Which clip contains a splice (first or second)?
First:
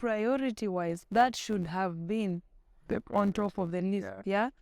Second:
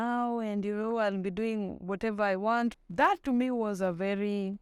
second